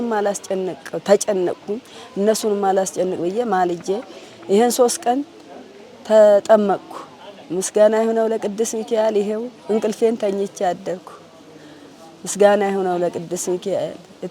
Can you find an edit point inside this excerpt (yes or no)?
no